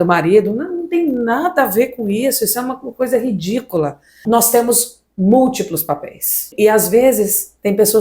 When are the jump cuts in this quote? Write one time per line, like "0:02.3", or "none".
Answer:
0:04.1
0:06.5